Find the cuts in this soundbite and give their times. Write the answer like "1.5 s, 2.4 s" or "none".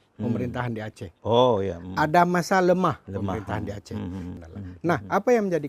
4.3 s